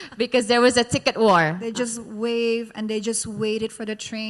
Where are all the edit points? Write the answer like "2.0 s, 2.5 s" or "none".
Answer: 1.6 s

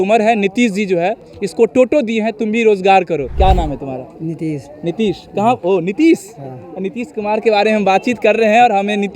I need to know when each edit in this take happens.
3.3 s

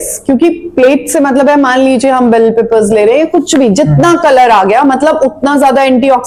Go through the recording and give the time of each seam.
none

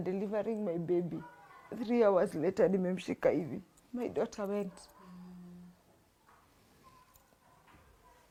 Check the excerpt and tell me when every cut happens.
none

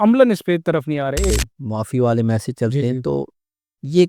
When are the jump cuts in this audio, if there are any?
1.3 s

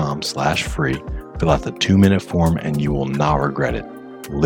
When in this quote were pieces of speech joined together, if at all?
none

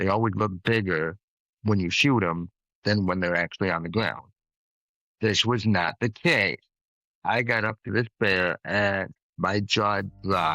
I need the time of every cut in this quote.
9.2 s

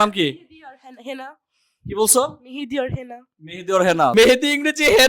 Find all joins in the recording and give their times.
4.1 s

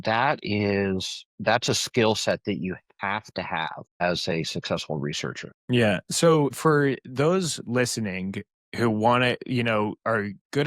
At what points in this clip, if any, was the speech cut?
4.0 s, 5.5 s, 6.6 s

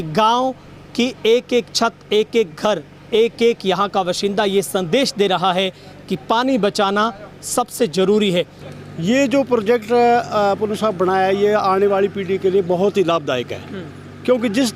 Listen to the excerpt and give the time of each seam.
8.6 s

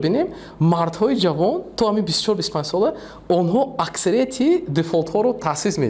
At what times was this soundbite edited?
none

